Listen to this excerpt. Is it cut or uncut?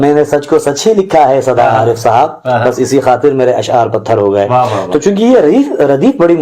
uncut